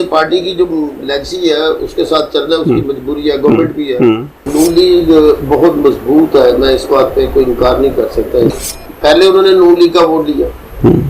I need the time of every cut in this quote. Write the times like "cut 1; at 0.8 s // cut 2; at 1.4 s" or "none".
cut 1; at 4.4 s // cut 2; at 8.6 s